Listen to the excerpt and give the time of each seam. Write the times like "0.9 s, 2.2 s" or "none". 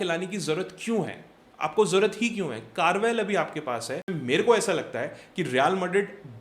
4.2 s

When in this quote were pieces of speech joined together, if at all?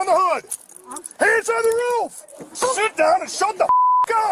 2.6 s

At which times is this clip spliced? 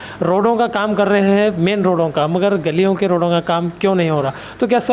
none

